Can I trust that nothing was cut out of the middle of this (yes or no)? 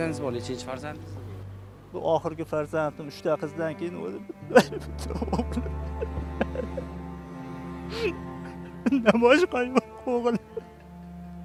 yes